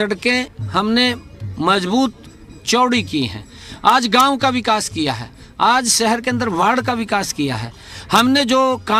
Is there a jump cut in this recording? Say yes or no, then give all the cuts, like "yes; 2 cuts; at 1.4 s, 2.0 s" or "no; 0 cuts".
no; 0 cuts